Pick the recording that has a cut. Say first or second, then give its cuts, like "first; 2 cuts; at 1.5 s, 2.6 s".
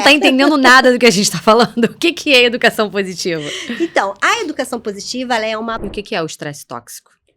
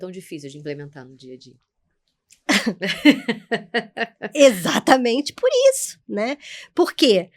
first; 1 cut; at 5.8 s